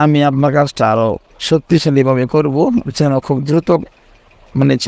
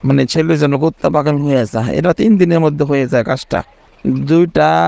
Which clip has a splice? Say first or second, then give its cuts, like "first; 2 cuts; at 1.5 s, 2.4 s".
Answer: second; 1 cut; at 3.9 s